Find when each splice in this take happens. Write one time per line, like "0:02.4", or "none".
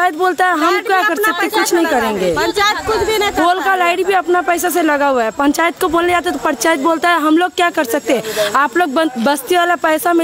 none

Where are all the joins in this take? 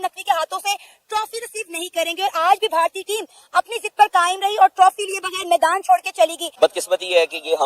none

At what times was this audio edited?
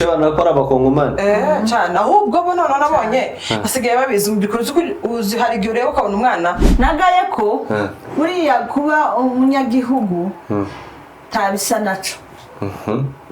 0:06.6

